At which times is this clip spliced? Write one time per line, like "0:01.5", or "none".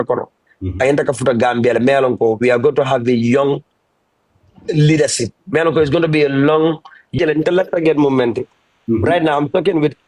0:07.2